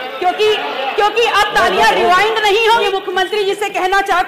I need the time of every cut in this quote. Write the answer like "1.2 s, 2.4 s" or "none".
2.8 s